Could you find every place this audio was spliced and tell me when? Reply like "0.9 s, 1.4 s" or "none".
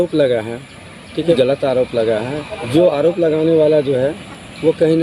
1.4 s, 2.5 s